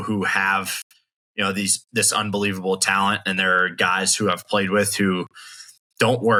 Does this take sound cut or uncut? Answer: uncut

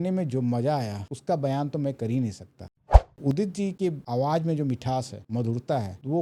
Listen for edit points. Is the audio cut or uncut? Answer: cut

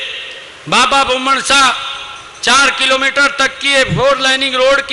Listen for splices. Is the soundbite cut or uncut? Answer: uncut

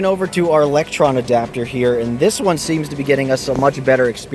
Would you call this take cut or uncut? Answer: uncut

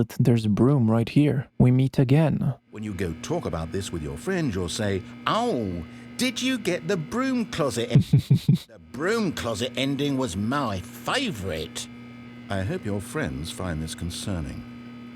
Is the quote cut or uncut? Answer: cut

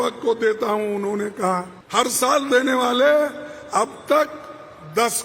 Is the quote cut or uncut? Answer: cut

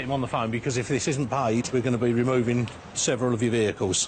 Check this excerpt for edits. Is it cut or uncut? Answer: cut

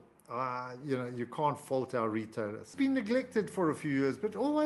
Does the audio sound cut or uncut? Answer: cut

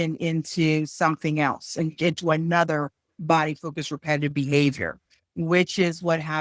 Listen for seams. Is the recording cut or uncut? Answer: uncut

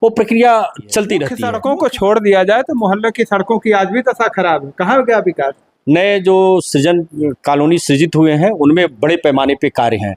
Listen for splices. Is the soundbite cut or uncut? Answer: cut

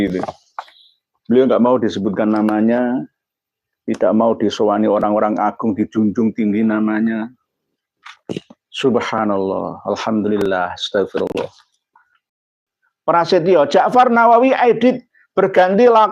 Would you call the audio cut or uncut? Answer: cut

